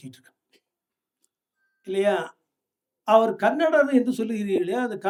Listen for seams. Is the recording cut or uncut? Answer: uncut